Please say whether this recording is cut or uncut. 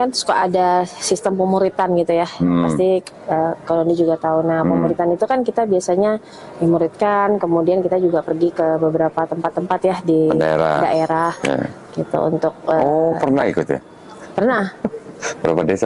uncut